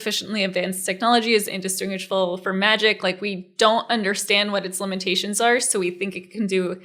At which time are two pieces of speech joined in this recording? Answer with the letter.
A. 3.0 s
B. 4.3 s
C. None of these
C